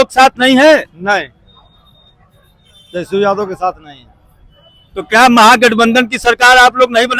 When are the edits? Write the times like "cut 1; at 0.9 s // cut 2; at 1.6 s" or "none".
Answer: none